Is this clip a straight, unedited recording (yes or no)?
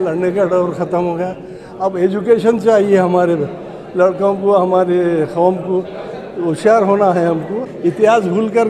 no